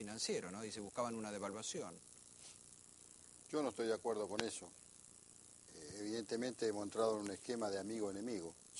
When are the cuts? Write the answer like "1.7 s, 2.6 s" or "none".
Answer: none